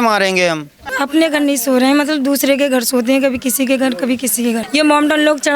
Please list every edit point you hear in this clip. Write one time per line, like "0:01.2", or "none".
0:00.9
0:04.7